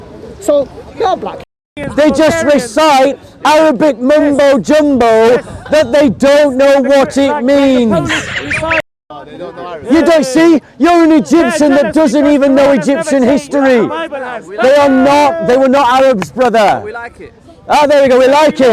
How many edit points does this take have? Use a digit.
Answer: 2